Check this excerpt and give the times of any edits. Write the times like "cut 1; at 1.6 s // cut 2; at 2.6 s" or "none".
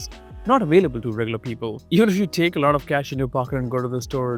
none